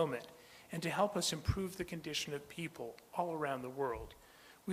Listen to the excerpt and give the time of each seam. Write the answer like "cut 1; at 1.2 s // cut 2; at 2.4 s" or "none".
cut 1; at 2.5 s

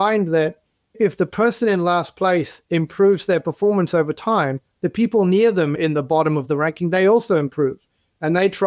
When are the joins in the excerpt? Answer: cut 1; at 5.7 s

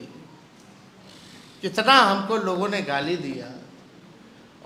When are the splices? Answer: none

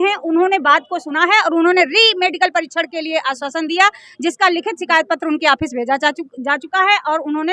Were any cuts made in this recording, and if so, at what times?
none

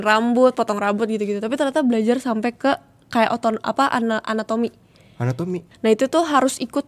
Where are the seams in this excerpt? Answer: cut 1; at 5.7 s

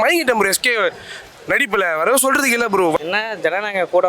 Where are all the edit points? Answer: cut 1; at 3.0 s

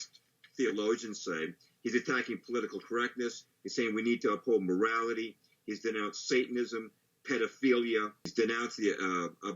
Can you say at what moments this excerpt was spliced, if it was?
cut 1; at 8.3 s

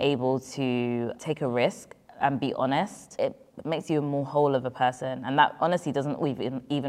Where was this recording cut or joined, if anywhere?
cut 1; at 1.2 s // cut 2; at 3.0 s

